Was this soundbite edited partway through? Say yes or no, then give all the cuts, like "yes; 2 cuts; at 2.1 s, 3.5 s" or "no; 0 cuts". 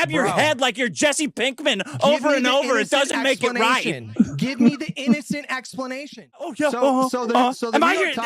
yes; 1 cut; at 6.5 s